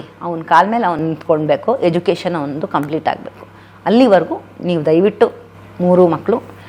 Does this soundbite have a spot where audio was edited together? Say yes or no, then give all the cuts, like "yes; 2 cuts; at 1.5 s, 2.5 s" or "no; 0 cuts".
no; 0 cuts